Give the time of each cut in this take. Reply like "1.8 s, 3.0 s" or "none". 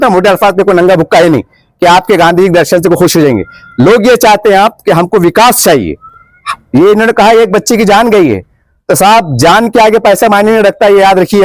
none